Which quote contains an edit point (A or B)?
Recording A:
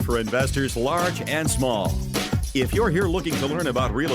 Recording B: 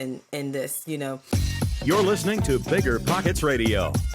B